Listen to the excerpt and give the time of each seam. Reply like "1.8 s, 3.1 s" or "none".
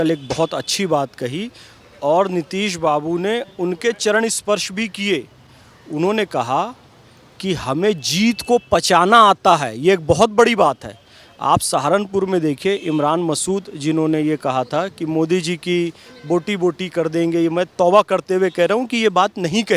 none